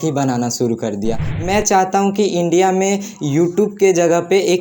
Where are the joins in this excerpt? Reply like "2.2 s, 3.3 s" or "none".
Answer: 1.3 s